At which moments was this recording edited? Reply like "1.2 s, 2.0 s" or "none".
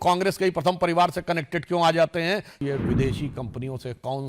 2.6 s